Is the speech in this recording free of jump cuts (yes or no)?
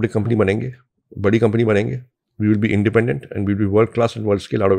yes